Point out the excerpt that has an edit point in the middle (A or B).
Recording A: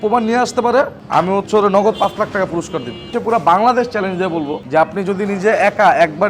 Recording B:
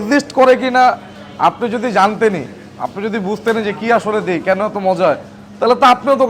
A